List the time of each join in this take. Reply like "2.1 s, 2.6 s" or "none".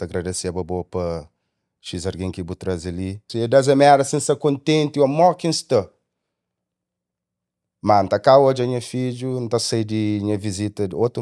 3.3 s